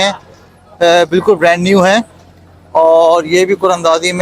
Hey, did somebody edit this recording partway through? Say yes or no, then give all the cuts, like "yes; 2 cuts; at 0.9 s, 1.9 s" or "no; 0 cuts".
no; 0 cuts